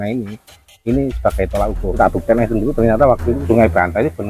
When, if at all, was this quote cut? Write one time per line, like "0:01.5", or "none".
0:02.0
0:03.4